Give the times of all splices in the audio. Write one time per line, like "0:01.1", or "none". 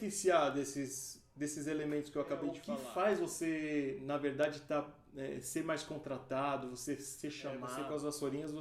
0:02.7
0:07.7